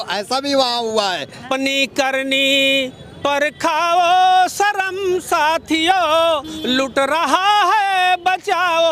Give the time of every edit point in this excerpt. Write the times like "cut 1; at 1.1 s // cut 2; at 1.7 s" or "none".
cut 1; at 1.4 s